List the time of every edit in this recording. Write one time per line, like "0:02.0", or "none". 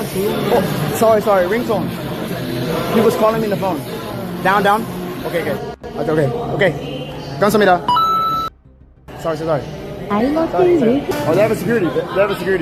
none